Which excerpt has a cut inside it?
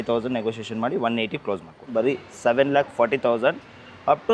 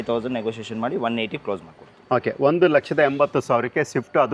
first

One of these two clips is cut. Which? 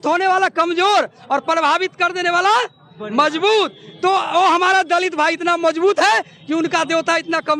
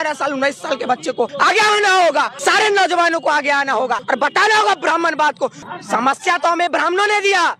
second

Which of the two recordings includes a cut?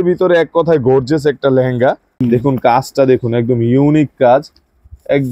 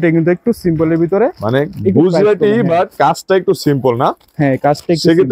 first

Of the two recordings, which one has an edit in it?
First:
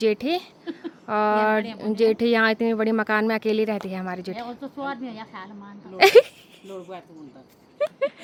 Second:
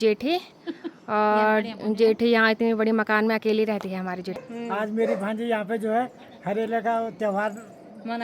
second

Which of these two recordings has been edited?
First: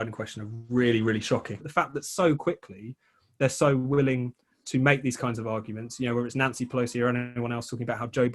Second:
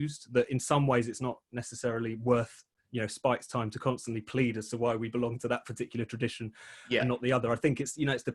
first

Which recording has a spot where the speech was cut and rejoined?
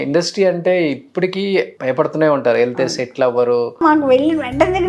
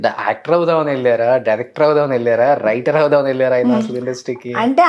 first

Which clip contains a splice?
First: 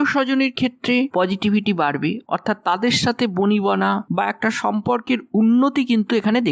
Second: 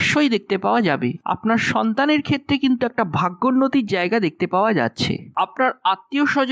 second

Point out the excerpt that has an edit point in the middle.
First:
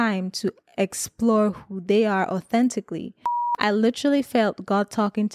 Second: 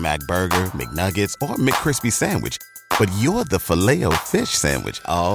first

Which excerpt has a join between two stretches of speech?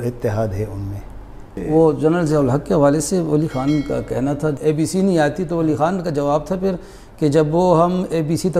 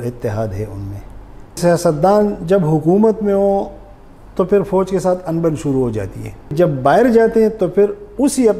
second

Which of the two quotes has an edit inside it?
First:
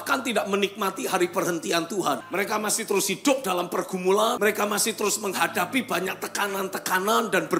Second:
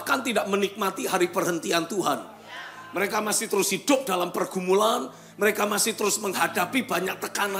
first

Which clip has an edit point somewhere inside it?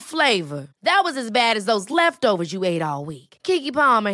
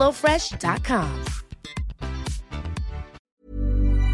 second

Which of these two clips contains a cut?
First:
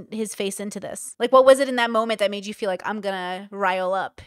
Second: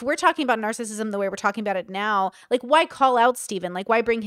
first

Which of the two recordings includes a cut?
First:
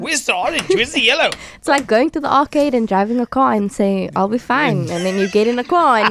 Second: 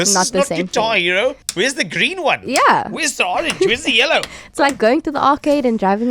second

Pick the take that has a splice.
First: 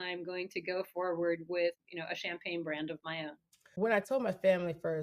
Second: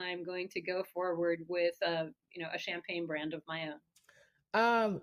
first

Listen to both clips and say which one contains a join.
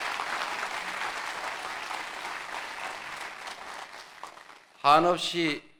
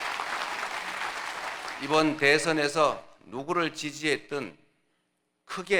second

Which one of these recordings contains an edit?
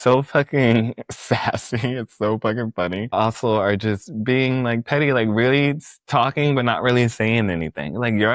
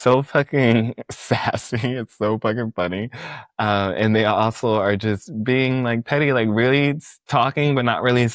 first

